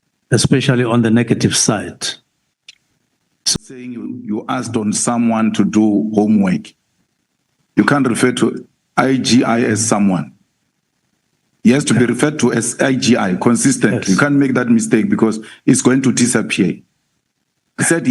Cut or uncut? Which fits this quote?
cut